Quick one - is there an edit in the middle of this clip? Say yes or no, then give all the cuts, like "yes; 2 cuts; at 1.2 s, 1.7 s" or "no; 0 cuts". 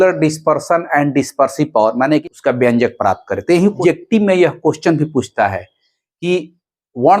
yes; 2 cuts; at 2.2 s, 3.8 s